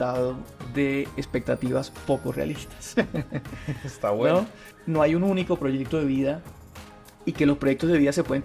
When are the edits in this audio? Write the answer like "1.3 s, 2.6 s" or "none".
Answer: 4.7 s